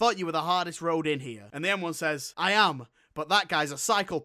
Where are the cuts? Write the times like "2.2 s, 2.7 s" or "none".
1.9 s